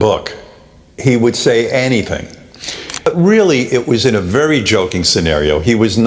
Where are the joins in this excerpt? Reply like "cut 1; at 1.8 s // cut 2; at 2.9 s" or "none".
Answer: cut 1; at 3.1 s